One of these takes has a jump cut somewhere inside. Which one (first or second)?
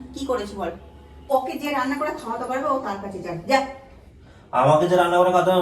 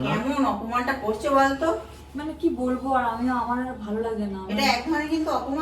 first